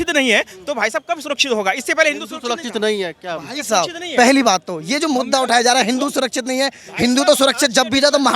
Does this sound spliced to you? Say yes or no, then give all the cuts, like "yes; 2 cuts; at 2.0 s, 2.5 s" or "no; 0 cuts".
no; 0 cuts